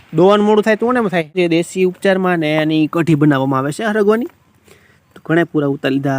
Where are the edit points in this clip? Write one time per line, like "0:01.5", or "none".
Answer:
0:01.3